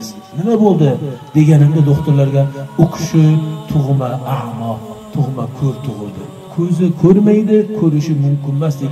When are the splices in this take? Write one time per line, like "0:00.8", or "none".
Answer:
0:06.3